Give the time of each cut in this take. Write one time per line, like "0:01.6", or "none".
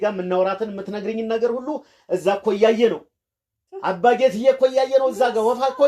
none